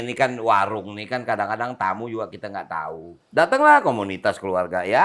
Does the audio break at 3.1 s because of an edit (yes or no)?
yes